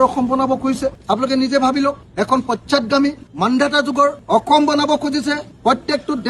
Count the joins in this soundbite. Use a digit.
0